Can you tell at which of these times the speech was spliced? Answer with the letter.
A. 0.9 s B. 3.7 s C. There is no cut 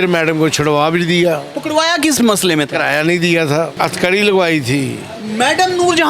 B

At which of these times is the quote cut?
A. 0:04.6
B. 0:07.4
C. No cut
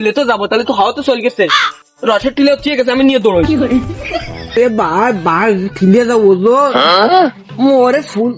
A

